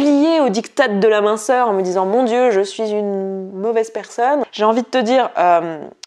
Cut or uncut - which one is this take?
cut